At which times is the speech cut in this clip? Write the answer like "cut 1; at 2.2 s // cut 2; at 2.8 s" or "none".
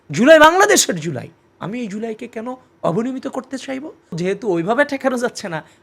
cut 1; at 4.2 s

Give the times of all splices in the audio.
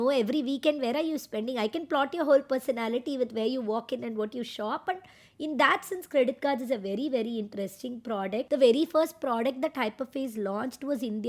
cut 1; at 8.5 s

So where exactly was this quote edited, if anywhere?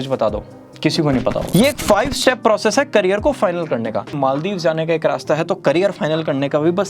cut 1; at 1.4 s // cut 2; at 4.1 s

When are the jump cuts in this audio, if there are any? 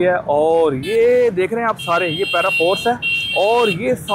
none

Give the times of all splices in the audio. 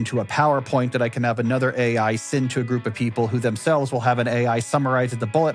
none

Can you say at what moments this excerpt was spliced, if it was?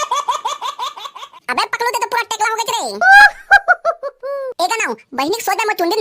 cut 1; at 0.9 s

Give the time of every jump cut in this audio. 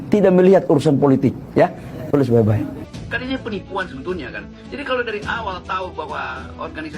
cut 1; at 2.9 s

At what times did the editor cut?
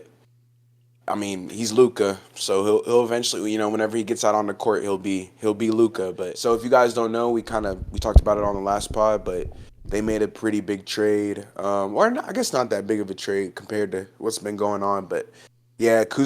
cut 1; at 6.3 s

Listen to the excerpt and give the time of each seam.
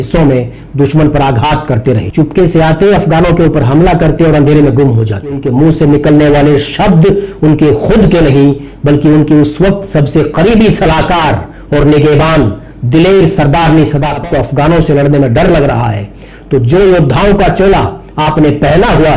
cut 1; at 5.4 s // cut 2; at 14.2 s

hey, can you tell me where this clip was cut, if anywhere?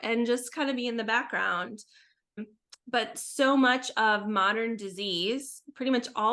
cut 1; at 2.4 s

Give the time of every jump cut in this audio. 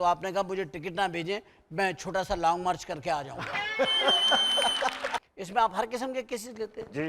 cut 1; at 5.3 s

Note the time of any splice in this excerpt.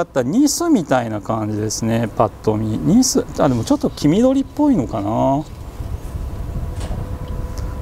none

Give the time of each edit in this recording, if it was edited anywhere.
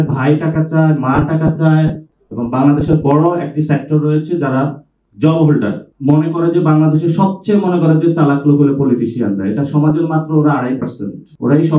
cut 1; at 2.1 s // cut 2; at 5.8 s

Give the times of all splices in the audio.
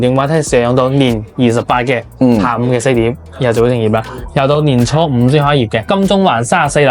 cut 1; at 5.9 s

